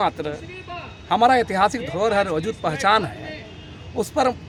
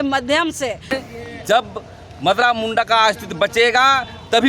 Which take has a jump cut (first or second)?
second